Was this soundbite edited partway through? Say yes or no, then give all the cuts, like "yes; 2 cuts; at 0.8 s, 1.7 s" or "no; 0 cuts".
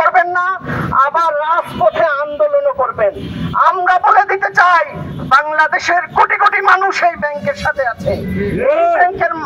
no; 0 cuts